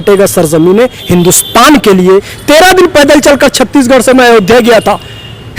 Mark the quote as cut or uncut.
cut